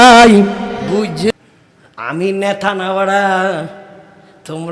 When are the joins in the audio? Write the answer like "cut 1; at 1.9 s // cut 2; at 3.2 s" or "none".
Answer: cut 1; at 1.3 s

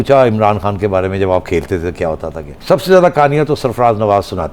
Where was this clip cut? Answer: cut 1; at 2.5 s

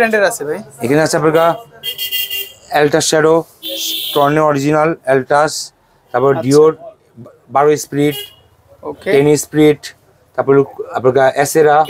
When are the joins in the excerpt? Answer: none

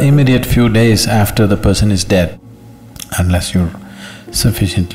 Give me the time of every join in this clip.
cut 1; at 2.3 s

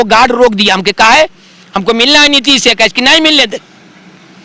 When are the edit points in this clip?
none

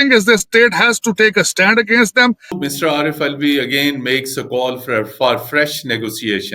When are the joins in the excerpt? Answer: cut 1; at 2.6 s

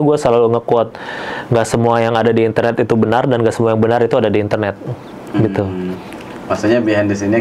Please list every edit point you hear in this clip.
none

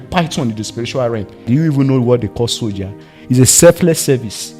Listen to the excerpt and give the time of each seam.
cut 1; at 1.5 s

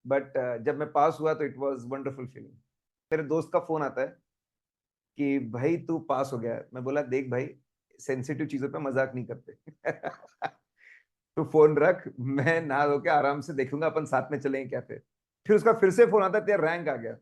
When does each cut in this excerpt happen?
cut 1; at 3.0 s

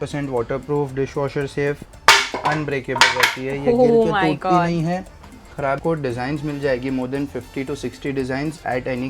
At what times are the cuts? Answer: cut 1; at 5.8 s

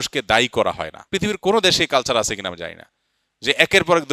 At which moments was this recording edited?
cut 1; at 0.9 s

